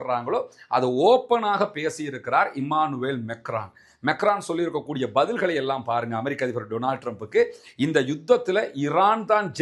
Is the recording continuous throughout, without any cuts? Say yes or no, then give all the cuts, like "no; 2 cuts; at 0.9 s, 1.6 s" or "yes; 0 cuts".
yes; 0 cuts